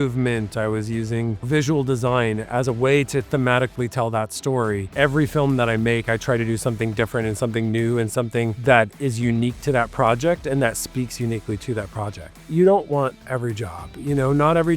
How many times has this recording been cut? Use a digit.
2